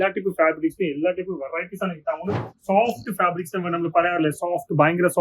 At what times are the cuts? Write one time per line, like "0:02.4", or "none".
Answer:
0:02.5